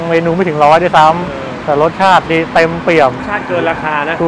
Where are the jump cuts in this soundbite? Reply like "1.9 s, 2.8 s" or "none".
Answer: 3.2 s